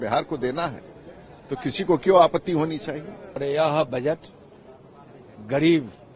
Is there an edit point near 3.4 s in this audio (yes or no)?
yes